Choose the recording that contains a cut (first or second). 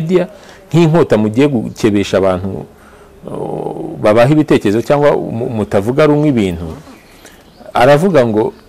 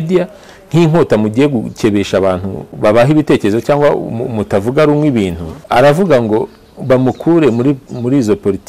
second